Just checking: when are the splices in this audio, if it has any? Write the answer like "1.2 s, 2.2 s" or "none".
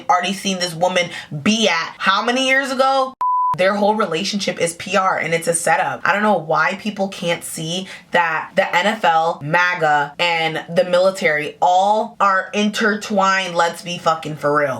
3.2 s